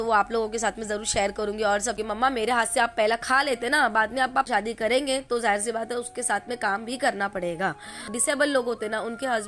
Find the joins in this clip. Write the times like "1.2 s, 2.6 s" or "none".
2.3 s, 4.5 s, 8.2 s